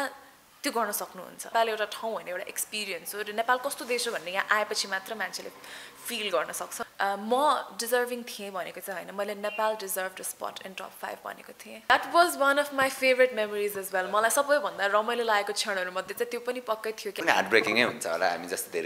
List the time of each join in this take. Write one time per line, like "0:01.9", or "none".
0:01.5
0:06.8
0:11.9
0:17.1